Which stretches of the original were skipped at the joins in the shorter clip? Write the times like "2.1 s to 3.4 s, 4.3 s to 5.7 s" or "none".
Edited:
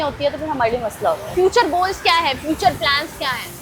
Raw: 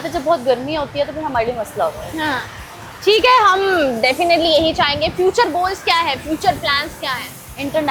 2.1 s to 5.1 s